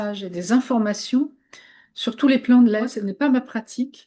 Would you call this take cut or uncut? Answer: cut